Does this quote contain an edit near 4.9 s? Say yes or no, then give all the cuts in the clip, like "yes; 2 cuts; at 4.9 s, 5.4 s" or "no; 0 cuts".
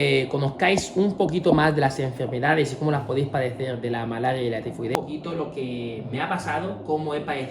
yes; 1 cut; at 4.9 s